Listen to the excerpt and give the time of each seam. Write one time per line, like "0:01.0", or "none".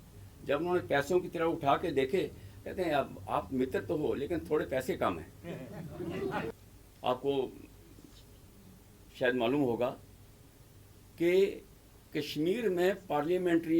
0:06.5

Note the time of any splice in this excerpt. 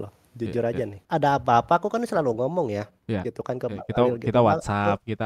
0:01.0

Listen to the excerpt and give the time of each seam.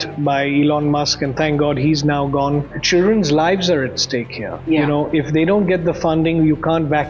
0:02.8

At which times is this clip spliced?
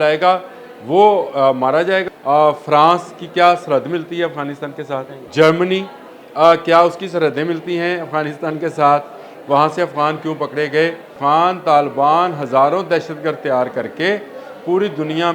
0:02.0
0:05.2
0:11.1

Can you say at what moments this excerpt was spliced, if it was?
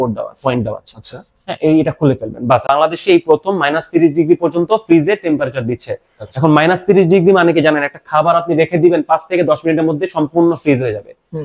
0:02.6

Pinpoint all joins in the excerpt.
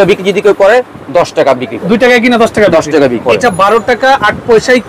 0:01.7
0:03.2

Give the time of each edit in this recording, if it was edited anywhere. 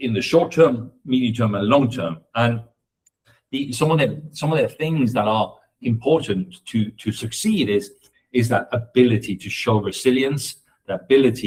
none

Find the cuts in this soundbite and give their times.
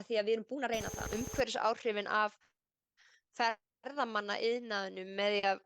0:01.0

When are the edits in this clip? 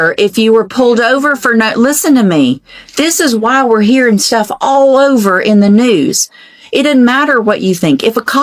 none

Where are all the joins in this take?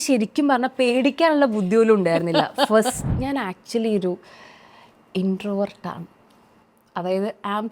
0:03.1

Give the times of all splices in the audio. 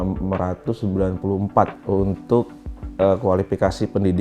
0:01.8

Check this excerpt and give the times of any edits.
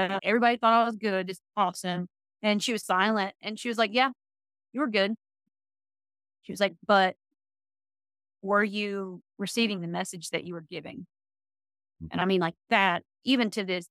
none

